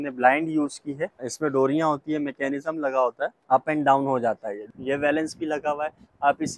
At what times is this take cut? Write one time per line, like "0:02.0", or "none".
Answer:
0:01.3
0:03.4
0:04.6